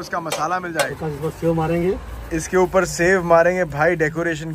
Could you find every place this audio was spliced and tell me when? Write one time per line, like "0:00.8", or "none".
0:00.9